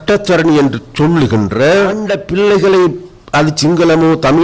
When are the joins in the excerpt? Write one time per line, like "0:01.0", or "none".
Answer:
0:02.1